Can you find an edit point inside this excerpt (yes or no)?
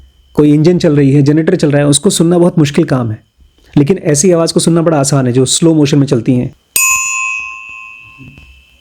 yes